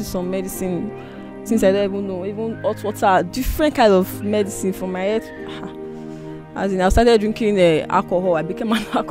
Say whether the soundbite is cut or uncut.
uncut